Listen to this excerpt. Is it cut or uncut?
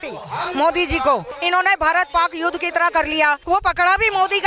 cut